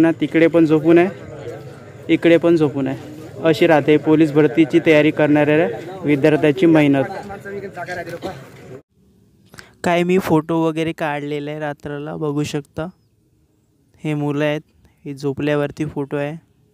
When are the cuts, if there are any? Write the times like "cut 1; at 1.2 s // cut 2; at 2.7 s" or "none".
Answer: none